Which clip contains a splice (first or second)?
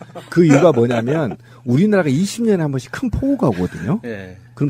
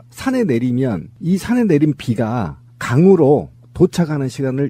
first